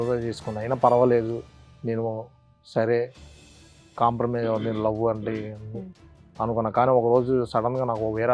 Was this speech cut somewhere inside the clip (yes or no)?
no